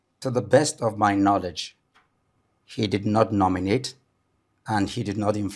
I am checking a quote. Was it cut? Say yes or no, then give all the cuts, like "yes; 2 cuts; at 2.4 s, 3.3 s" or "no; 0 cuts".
no; 0 cuts